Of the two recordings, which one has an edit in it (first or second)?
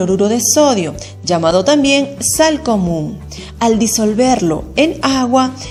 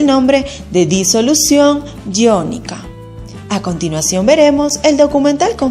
second